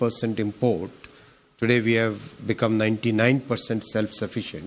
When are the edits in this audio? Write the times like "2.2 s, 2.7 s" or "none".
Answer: none

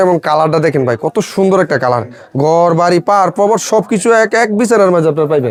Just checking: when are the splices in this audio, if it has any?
none

